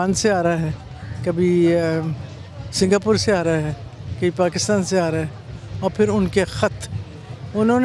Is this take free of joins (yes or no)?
yes